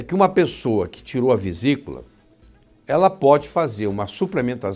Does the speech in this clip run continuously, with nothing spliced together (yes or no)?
yes